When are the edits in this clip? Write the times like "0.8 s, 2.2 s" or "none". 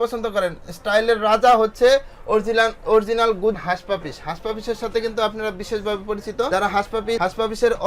3.6 s